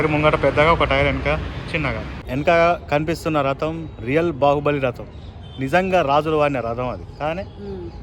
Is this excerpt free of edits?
no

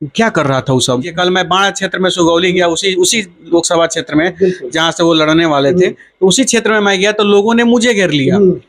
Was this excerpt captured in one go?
no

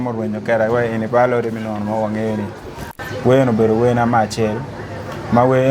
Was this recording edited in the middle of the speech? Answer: yes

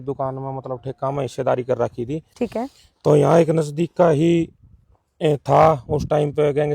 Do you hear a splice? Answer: no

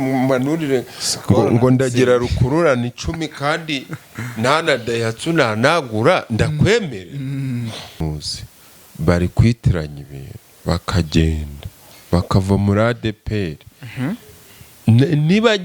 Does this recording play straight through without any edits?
no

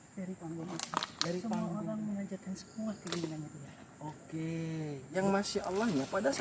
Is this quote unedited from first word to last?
no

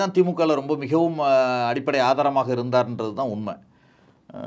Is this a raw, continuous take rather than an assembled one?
yes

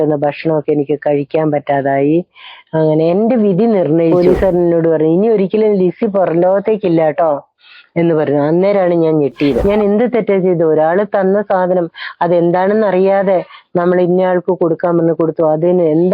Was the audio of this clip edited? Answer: yes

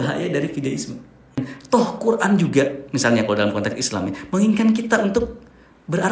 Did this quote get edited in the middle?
yes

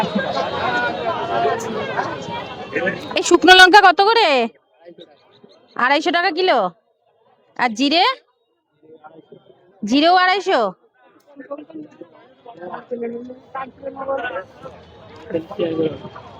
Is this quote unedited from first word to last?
yes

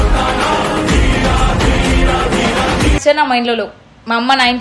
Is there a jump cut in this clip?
yes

